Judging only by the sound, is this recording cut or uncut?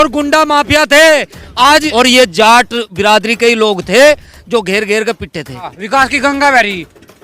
cut